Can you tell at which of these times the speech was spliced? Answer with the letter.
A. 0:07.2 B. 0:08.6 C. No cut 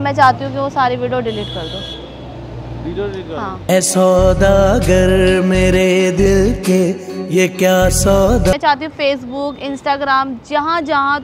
B